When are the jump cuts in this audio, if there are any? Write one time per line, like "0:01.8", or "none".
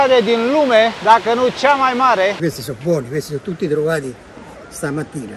0:02.4